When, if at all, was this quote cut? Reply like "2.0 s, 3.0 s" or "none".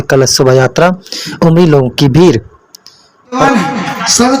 3.4 s